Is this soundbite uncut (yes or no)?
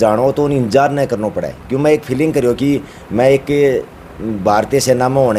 yes